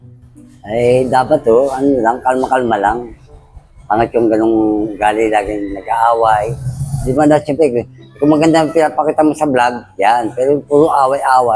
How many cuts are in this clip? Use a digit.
1